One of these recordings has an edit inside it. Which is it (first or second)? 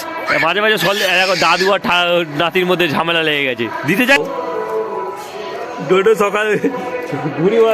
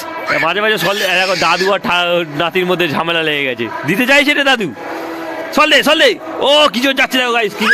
first